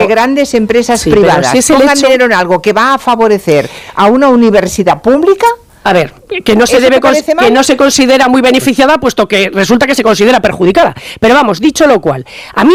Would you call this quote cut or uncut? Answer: uncut